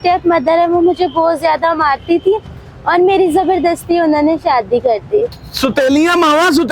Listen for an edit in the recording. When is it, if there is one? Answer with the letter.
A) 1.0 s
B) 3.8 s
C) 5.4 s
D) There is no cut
C